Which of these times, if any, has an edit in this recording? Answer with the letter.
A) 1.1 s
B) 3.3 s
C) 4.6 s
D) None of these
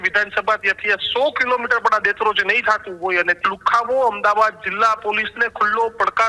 B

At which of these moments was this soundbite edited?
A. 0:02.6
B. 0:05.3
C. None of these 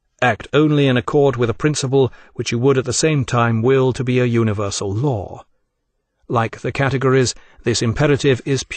A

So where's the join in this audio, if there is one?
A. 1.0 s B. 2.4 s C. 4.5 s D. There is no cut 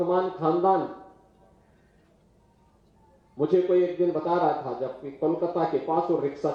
D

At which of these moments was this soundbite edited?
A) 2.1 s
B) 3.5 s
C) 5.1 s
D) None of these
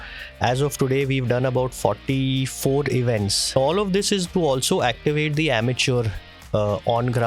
B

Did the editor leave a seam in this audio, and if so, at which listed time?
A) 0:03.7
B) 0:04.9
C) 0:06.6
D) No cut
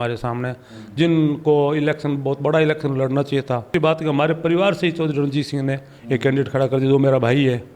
A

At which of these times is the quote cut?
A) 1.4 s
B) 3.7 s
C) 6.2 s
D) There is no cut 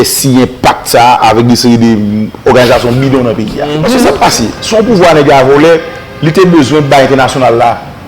B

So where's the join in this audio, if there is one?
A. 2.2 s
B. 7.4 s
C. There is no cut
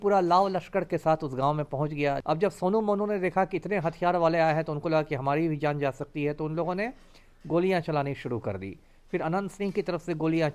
A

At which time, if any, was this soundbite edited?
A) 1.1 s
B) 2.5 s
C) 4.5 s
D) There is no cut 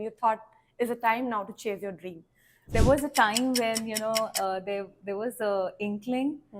B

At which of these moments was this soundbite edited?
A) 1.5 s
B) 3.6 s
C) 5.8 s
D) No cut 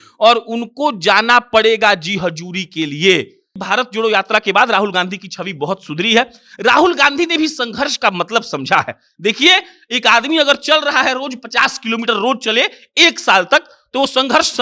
B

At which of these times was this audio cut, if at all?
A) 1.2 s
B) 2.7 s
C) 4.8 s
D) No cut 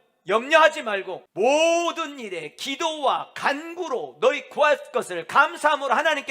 A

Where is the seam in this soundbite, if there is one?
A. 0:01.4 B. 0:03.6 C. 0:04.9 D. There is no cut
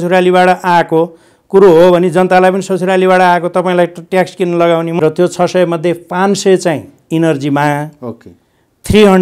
C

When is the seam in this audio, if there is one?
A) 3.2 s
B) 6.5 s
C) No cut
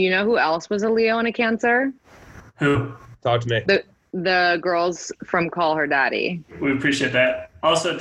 B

